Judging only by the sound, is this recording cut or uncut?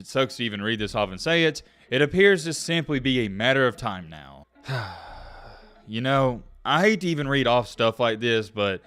uncut